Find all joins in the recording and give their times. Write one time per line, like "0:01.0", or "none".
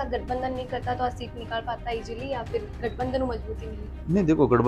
none